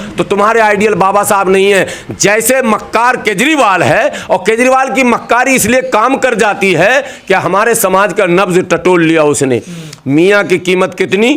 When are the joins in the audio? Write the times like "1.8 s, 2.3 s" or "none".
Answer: none